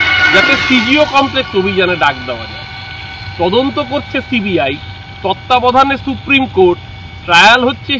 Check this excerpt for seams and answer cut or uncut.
uncut